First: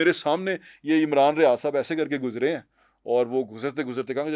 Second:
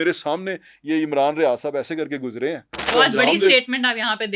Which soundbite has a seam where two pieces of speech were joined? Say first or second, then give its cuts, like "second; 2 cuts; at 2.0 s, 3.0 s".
second; 1 cut; at 2.9 s